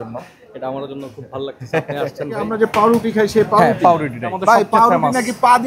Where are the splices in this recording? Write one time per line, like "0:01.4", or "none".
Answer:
0:02.5
0:04.4

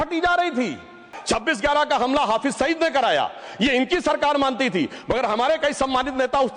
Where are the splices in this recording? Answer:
0:01.1

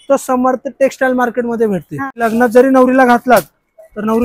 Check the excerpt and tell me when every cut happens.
0:02.2

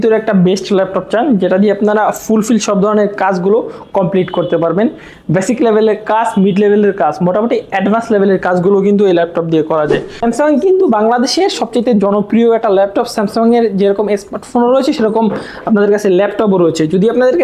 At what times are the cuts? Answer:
0:10.2

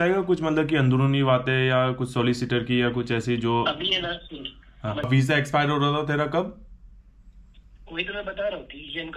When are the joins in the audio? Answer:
0:05.1

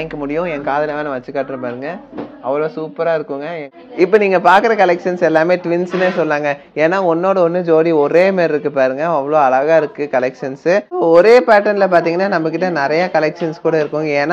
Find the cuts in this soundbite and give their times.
0:03.7
0:11.1

